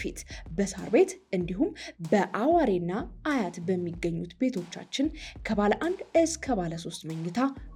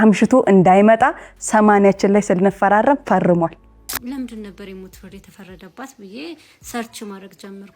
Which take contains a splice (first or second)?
second